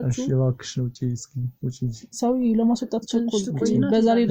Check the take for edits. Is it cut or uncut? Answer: uncut